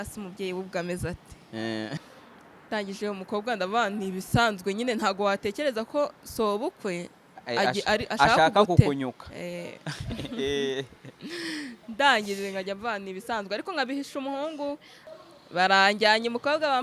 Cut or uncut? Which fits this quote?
cut